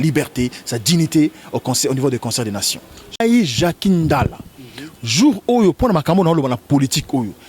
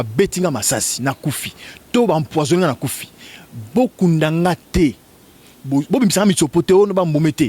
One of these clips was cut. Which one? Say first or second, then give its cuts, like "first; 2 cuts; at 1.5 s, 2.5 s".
first; 1 cut; at 3.2 s